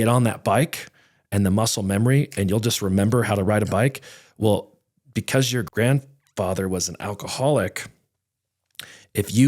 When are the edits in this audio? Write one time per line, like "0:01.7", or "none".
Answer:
0:05.7